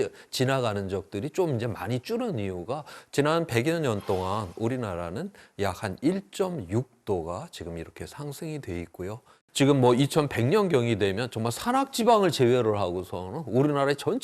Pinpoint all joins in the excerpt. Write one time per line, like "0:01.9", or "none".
0:03.0
0:09.4